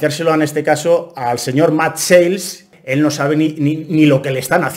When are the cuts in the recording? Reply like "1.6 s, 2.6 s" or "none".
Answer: 2.7 s

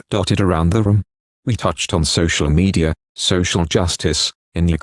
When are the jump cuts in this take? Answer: 1.4 s

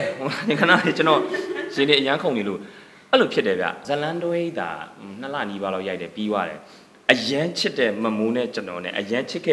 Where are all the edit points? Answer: 3.8 s

